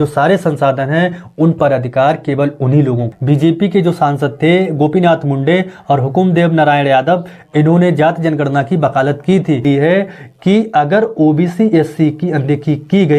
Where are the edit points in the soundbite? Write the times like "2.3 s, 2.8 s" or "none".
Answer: 3.1 s, 9.6 s